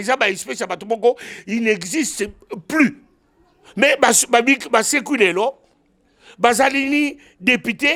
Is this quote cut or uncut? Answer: uncut